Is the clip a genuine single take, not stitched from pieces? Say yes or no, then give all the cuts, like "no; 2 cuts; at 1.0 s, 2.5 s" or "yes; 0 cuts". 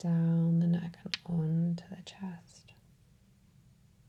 yes; 0 cuts